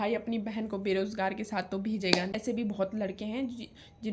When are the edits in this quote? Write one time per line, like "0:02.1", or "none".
0:02.3